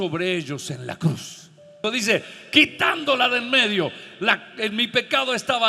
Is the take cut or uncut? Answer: cut